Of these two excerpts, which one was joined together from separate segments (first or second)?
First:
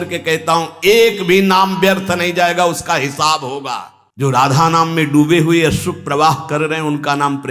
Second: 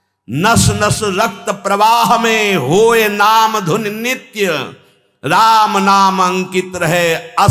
first